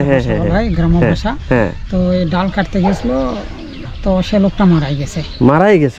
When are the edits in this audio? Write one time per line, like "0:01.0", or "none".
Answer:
0:03.9